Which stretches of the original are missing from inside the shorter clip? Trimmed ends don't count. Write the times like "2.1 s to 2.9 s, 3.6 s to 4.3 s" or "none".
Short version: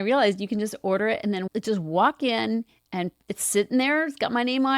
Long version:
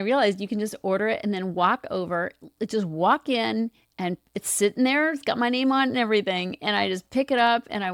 1.5 s to 2.5 s